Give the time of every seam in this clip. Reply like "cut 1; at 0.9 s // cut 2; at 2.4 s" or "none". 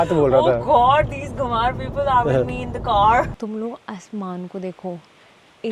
cut 1; at 3.4 s